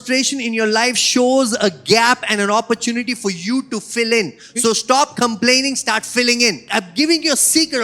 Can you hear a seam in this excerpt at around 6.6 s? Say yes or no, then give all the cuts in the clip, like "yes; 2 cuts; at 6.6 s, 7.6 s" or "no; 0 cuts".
yes; 1 cut; at 6.6 s